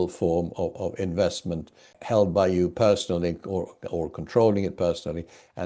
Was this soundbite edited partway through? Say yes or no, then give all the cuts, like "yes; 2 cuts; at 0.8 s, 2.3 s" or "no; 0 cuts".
no; 0 cuts